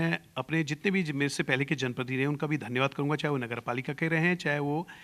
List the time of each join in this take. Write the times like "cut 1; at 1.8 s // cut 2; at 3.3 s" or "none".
none

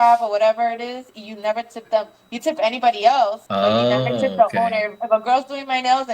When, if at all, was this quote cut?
cut 1; at 3.4 s

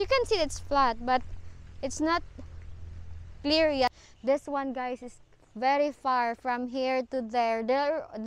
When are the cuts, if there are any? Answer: cut 1; at 3.9 s

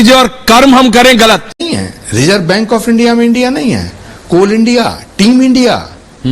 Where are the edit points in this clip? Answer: cut 1; at 1.6 s

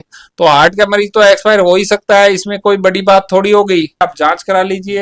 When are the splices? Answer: cut 1; at 4.0 s

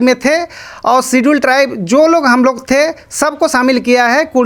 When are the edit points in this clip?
none

